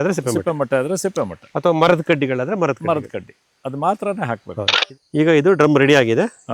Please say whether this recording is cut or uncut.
cut